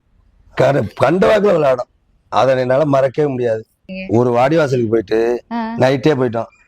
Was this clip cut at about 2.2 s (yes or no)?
no